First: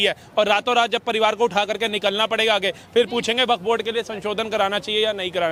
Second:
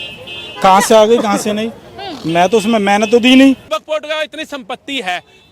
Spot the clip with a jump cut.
second; 1 cut; at 3.8 s

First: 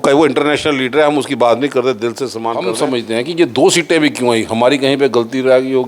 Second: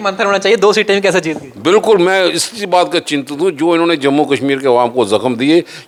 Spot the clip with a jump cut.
first; 1 cut; at 2.7 s

